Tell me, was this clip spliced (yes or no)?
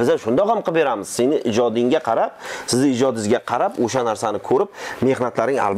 no